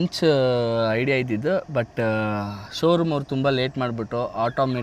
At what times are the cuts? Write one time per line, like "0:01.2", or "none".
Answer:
none